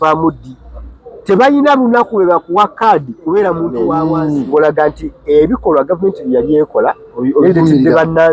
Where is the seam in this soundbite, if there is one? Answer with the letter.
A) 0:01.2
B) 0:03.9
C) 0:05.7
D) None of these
B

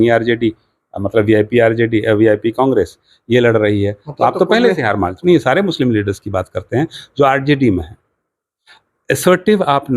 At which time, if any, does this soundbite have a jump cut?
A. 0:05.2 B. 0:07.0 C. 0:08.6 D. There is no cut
A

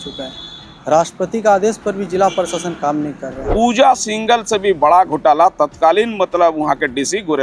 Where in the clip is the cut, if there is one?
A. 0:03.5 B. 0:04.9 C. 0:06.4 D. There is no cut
A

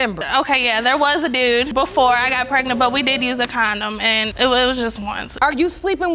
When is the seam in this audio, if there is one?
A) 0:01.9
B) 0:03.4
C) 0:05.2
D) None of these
C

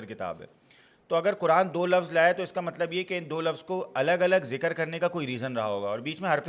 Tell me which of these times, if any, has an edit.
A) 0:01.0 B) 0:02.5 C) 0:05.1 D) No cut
D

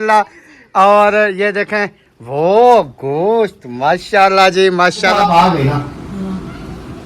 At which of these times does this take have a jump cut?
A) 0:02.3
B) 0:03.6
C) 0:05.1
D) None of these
C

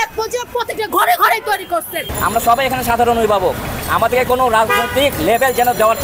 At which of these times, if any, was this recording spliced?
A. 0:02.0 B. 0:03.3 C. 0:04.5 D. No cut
A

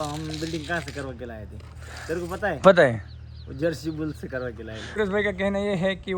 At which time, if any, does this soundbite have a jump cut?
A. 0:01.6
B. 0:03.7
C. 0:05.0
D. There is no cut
C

